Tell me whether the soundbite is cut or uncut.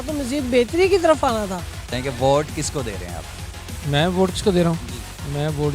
cut